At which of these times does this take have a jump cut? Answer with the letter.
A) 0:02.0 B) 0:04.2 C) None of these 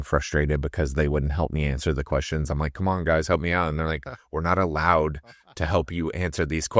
C